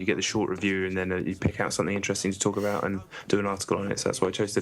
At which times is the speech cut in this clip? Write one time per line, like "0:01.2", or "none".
0:02.5